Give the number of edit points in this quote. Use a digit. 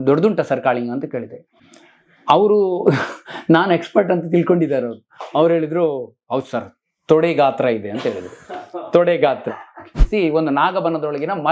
1